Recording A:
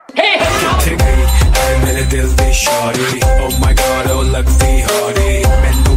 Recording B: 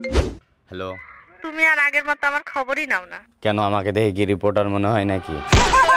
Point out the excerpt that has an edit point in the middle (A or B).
B